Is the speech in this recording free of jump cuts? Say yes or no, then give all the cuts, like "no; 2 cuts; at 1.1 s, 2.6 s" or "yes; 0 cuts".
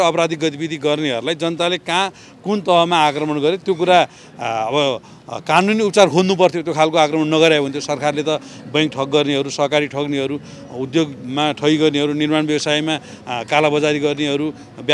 yes; 0 cuts